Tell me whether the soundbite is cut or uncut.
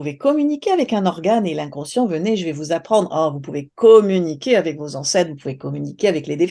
uncut